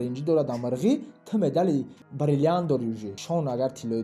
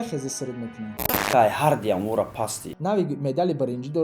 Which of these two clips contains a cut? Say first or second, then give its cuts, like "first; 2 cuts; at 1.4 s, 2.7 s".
second; 2 cuts; at 1.0 s, 2.8 s